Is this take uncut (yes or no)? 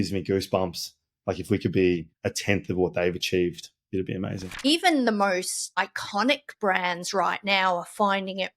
no